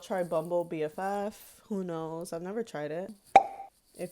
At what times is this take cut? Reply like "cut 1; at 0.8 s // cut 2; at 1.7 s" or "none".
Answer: cut 1; at 3.2 s